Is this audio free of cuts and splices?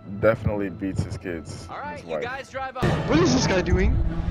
no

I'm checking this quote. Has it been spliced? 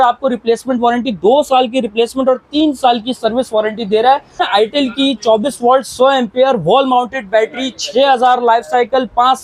yes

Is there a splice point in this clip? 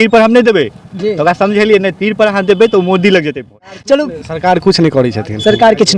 yes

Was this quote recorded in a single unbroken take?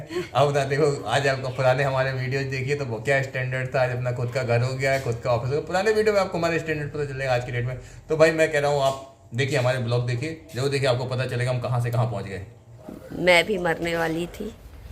no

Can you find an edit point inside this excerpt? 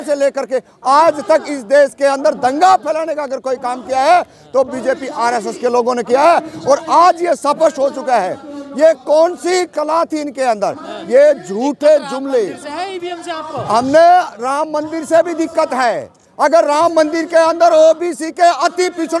no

